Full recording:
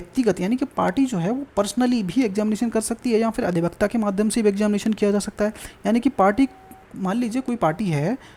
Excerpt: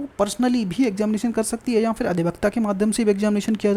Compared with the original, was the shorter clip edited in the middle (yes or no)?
no